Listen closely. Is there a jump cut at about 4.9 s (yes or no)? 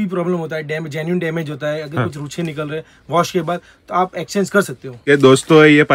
yes